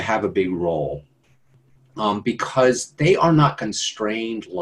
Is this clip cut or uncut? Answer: uncut